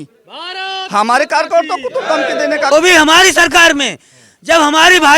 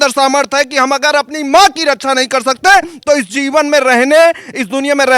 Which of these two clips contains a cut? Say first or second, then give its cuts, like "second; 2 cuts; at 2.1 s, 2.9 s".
first; 1 cut; at 2.7 s